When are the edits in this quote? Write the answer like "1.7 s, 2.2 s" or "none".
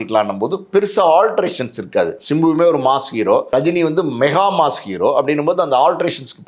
2.2 s, 3.5 s